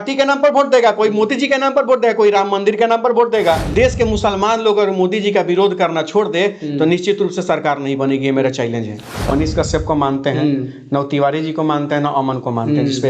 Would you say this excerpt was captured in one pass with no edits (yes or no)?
no